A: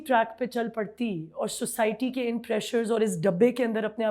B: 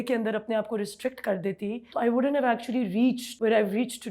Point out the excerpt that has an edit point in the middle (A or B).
B